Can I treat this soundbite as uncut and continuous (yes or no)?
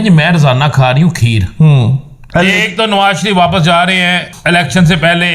no